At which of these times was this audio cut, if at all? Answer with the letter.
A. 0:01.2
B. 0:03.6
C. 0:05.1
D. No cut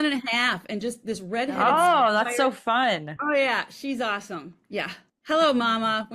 C